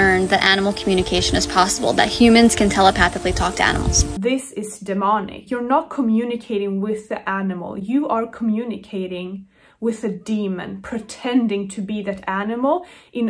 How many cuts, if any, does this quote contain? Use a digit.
2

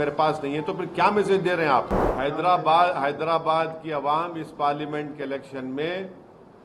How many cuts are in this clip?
1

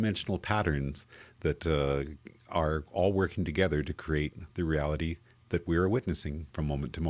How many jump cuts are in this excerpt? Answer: 0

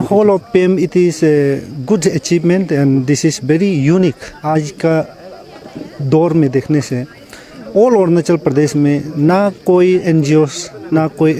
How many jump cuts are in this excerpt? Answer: 1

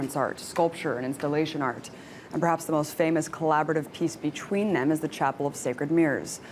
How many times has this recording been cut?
1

